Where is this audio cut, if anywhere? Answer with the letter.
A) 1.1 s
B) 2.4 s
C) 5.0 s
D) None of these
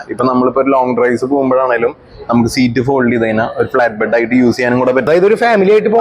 C